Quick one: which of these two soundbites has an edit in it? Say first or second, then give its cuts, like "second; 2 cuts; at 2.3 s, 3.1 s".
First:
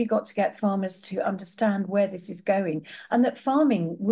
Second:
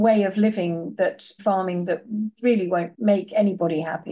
second; 2 cuts; at 1.4 s, 2.9 s